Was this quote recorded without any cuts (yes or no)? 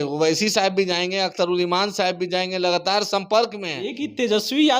no